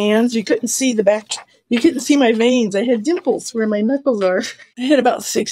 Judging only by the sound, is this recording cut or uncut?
cut